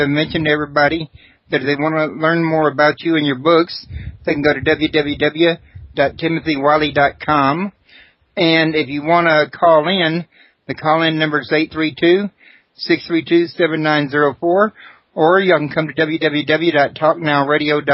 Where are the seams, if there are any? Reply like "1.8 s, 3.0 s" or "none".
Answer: 5.0 s